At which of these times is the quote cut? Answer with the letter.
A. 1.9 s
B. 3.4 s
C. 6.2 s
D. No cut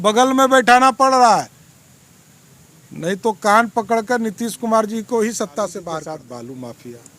C